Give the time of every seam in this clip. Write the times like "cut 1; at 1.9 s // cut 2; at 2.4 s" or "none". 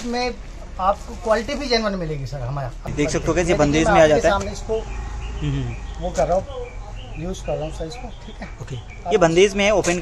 cut 1; at 2.9 s